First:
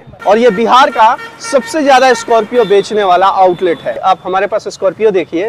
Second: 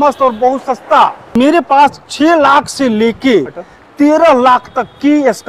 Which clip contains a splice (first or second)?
first